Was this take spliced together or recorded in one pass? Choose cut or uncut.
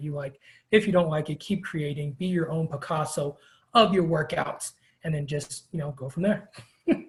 uncut